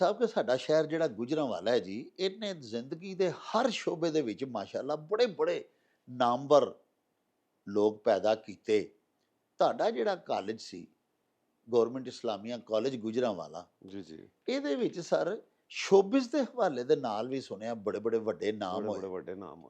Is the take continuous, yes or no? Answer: yes